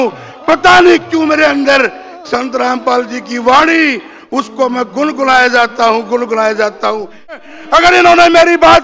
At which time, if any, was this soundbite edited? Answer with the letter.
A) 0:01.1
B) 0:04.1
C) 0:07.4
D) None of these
C